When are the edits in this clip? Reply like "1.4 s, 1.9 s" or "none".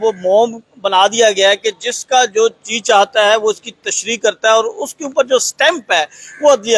none